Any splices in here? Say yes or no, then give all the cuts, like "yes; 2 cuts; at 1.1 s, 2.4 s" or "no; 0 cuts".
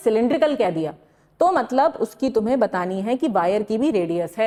no; 0 cuts